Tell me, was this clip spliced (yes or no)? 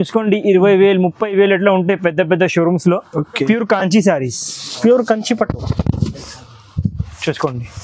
yes